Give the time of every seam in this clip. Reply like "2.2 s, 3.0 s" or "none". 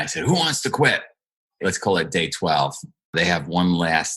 1.6 s, 3.1 s

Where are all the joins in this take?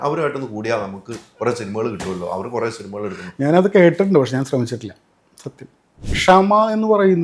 6.1 s

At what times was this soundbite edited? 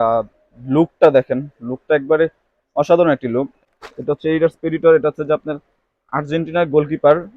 3.6 s

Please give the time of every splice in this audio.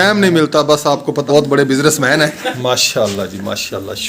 1.2 s, 2.4 s

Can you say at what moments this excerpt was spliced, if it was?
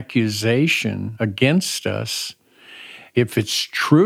1.1 s, 3.1 s

